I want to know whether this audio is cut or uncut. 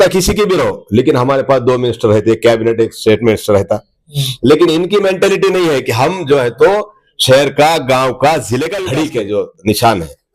cut